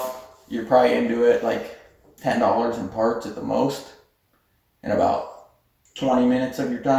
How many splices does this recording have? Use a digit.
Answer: 0